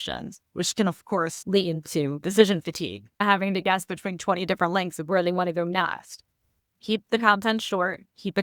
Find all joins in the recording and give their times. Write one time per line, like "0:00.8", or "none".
0:01.4
0:03.2

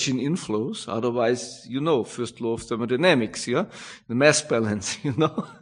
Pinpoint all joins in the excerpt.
none

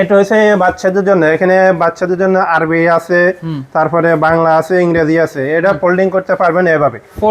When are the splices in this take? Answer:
none

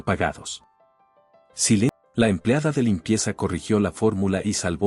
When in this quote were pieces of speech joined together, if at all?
none

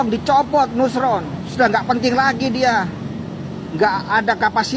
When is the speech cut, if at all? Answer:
0:01.4

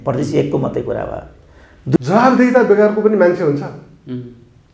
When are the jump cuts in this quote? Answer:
0:02.0

